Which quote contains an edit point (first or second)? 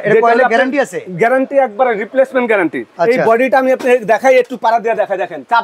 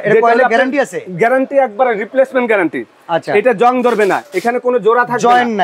first